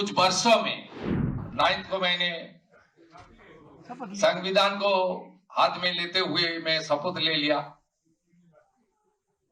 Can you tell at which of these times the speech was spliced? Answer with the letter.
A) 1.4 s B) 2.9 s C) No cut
A